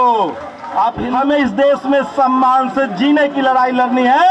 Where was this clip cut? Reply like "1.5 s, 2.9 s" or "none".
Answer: 1.0 s